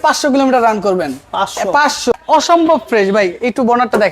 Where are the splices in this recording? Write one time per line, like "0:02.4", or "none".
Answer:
0:02.2